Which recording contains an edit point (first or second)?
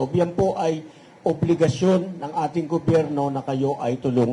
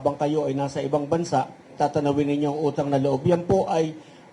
second